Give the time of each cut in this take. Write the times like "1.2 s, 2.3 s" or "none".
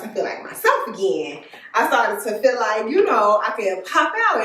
none